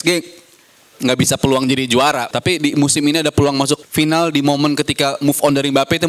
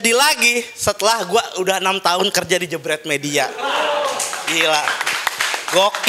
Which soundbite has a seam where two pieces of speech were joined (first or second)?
first